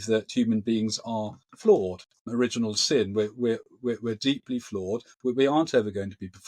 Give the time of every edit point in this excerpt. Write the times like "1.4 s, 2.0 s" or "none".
2.3 s